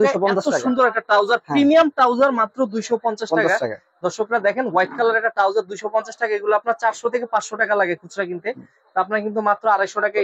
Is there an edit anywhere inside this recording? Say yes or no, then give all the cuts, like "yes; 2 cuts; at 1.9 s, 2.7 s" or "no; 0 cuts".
no; 0 cuts